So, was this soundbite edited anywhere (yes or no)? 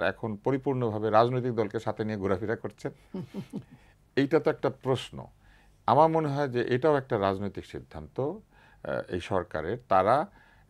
no